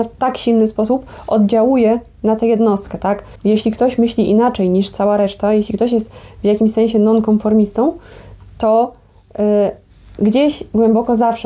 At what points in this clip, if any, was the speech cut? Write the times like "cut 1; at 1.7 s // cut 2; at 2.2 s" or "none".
none

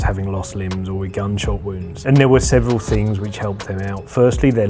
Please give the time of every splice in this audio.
cut 1; at 2.0 s

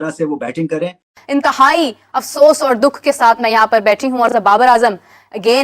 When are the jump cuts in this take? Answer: cut 1; at 1.1 s

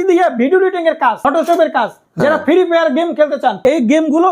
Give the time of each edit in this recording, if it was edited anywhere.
cut 1; at 1.2 s // cut 2; at 2.0 s // cut 3; at 3.6 s

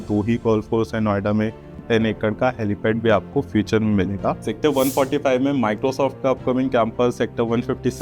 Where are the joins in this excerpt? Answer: cut 1; at 1.8 s // cut 2; at 4.5 s

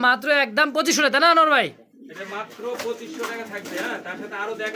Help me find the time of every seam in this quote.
none

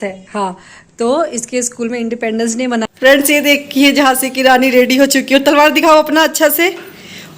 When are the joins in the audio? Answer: cut 1; at 2.9 s

